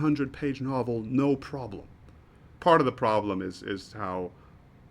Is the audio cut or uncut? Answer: cut